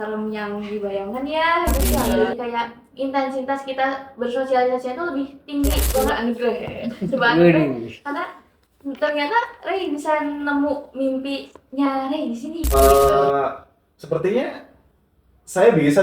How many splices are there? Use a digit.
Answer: 3